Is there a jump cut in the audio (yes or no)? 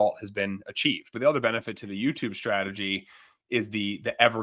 yes